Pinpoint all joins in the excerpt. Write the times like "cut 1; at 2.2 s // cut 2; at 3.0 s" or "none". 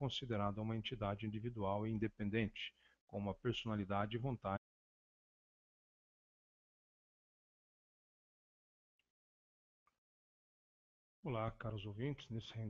none